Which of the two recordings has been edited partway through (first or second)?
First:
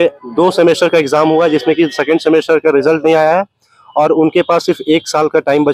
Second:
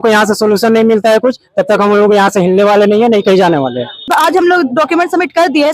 second